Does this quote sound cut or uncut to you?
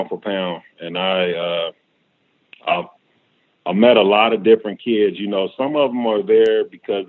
uncut